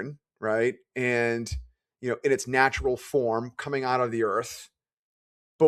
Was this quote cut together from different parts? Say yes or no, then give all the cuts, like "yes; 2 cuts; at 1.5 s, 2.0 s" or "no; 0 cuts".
no; 0 cuts